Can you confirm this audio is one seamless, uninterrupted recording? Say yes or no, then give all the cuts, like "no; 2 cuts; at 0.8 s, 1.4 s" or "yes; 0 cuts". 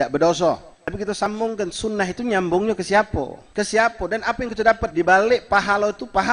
no; 2 cuts; at 1.3 s, 3.4 s